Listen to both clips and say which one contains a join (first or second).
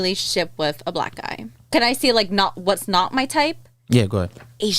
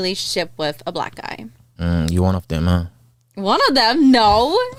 first